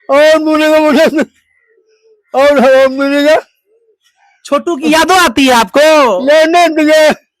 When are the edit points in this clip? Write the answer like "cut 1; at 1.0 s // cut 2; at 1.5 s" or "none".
none